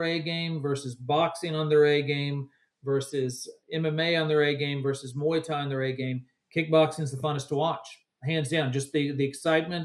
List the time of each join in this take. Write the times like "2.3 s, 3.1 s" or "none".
none